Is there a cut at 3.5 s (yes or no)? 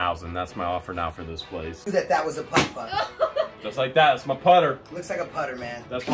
no